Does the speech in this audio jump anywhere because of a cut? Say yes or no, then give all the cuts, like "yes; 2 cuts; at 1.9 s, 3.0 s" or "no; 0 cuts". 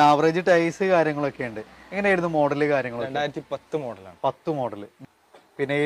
yes; 1 cut; at 4.9 s